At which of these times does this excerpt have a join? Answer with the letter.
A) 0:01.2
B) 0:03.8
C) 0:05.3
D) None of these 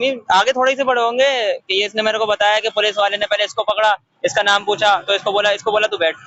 D